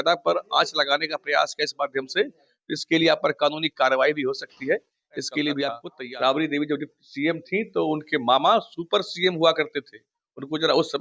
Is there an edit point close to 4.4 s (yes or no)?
no